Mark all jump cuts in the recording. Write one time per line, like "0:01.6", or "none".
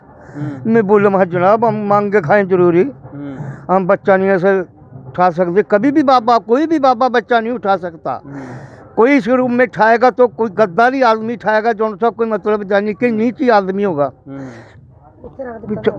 none